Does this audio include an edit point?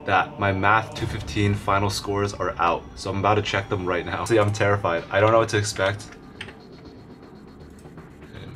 no; 0 cuts

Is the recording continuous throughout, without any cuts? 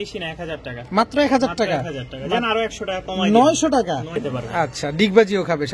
no; 1 cut; at 4.2 s

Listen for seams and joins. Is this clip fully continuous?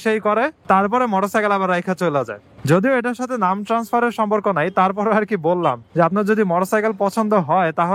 yes; 0 cuts

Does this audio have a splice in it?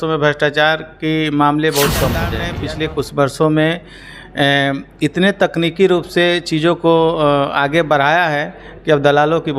yes; 1 cut; at 2.4 s

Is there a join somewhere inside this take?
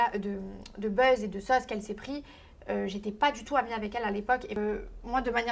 yes; 1 cut; at 4.6 s

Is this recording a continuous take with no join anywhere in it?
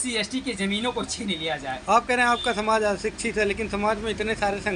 yes; 0 cuts

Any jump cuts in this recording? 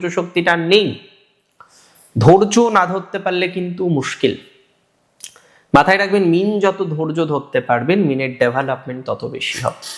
no; 0 cuts

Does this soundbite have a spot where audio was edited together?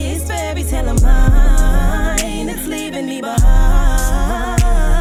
no; 0 cuts

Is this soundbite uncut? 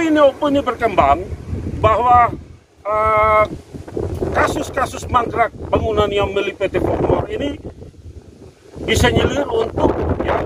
yes; 0 cuts

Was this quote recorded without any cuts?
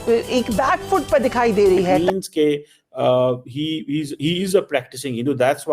no; 1 cut; at 2.0 s

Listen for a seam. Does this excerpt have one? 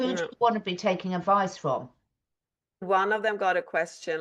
yes; 1 cut; at 2.8 s

